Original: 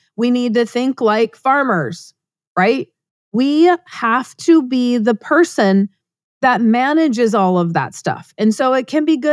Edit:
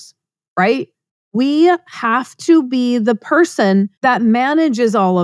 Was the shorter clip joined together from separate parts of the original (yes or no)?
yes